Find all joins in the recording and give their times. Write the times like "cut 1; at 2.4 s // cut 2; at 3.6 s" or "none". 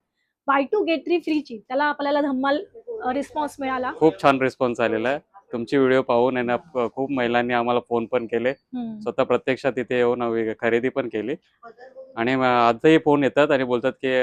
none